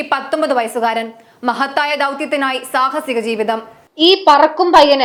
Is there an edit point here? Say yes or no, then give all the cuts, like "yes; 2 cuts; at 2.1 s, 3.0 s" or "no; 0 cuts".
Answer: no; 0 cuts